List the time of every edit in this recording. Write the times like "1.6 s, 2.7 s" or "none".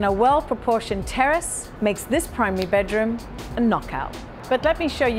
none